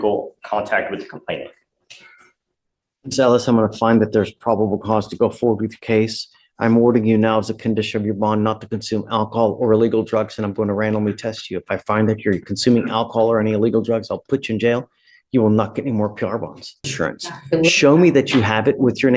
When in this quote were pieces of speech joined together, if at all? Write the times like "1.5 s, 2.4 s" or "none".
16.9 s